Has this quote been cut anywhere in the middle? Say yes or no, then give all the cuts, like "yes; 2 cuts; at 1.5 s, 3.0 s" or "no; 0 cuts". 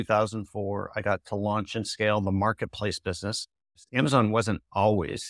yes; 1 cut; at 3.8 s